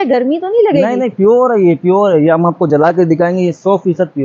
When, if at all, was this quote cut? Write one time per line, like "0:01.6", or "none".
none